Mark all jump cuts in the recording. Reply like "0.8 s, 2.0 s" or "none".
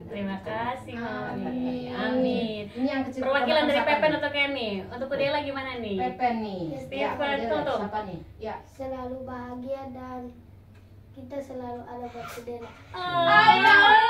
none